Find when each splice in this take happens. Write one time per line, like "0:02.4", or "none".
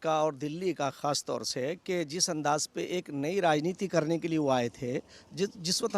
none